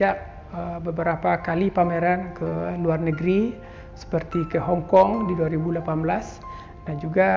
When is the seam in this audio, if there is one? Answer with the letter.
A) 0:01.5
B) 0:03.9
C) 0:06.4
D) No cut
D